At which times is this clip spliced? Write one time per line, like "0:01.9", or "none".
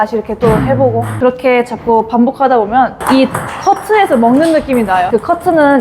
0:01.1
0:03.0
0:05.1